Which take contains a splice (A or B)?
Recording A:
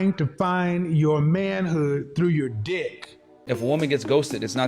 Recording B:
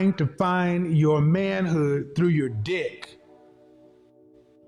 A